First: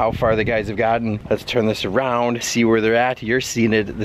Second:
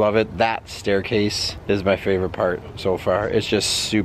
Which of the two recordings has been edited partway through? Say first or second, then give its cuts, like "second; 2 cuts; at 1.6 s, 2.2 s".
first; 1 cut; at 1.2 s